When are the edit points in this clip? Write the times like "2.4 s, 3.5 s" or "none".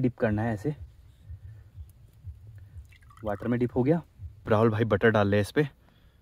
4.5 s